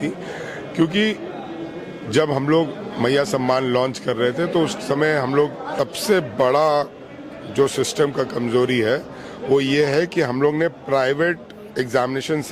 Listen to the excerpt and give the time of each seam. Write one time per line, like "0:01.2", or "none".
0:05.7